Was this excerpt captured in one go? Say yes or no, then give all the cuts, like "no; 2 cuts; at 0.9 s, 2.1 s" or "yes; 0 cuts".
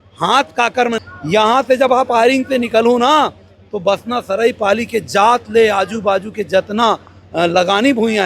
no; 1 cut; at 1.0 s